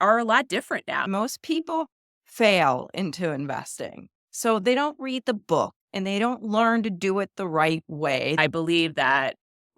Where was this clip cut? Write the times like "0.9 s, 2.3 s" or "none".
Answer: 1.1 s, 8.4 s